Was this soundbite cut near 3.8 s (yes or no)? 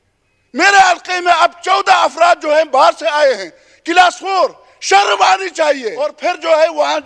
no